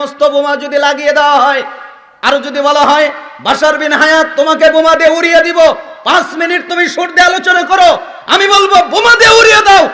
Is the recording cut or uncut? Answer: uncut